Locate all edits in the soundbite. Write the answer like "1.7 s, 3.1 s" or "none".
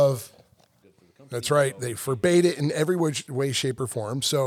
1.2 s